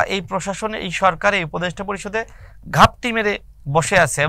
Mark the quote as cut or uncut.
uncut